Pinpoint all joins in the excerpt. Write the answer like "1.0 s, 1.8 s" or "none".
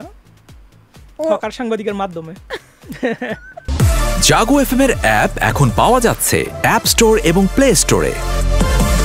3.6 s